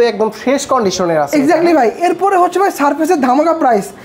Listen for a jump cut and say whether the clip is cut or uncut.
uncut